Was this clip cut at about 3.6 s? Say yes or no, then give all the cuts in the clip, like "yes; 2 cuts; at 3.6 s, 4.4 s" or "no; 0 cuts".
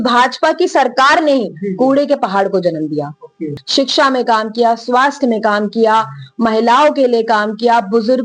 yes; 1 cut; at 3.6 s